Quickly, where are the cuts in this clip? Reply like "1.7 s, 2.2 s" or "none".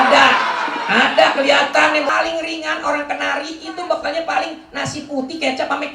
2.1 s

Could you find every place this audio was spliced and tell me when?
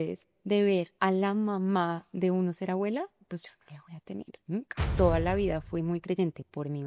0.9 s, 4.8 s

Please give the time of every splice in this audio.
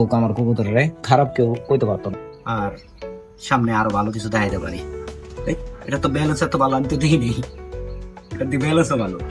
2.1 s

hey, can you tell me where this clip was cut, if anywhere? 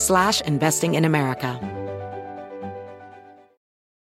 1.6 s

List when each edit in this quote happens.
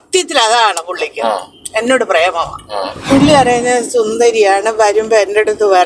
2.9 s

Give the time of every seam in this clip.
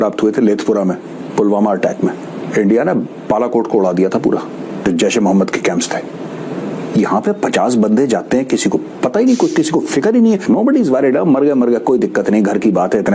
2.4 s, 4.8 s, 10.4 s

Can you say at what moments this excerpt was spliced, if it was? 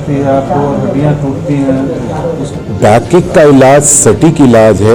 2.5 s

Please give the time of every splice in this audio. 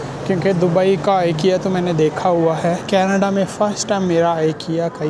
2.8 s

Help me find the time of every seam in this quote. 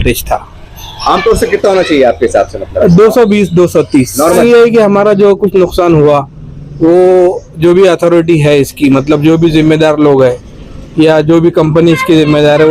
4.4 s

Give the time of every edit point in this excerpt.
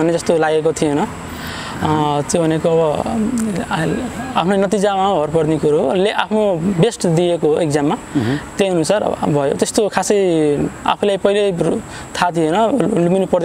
none

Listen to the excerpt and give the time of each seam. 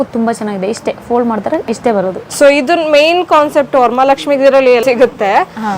2.2 s, 4.8 s

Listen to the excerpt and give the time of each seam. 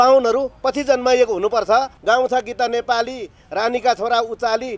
1.9 s

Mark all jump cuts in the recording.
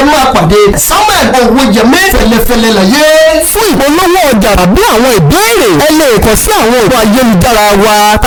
none

